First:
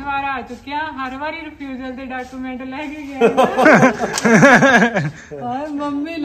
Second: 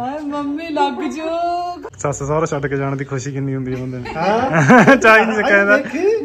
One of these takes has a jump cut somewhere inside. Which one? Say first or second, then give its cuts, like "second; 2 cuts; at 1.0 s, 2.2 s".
second; 1 cut; at 1.8 s